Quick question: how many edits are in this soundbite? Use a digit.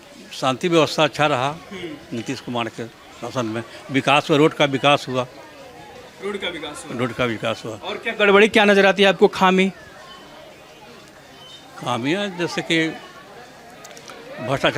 0